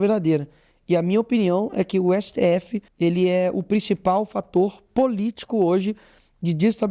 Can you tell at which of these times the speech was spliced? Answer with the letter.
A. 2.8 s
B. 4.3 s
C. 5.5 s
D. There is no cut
A